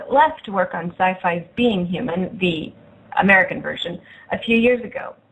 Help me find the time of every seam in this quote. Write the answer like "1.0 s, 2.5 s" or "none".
2.8 s